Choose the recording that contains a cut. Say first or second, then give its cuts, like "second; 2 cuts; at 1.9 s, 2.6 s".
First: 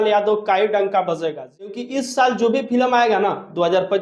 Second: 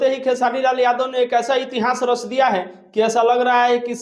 first; 1 cut; at 1.7 s